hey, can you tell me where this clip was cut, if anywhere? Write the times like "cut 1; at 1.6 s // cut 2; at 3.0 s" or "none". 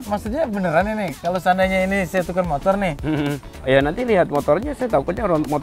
cut 1; at 3.5 s